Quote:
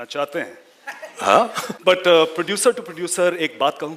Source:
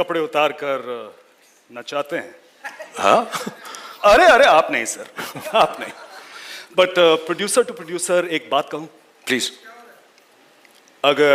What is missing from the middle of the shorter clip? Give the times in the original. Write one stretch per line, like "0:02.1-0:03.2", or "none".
0:03.4-0:06.6